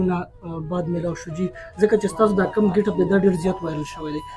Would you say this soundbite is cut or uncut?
uncut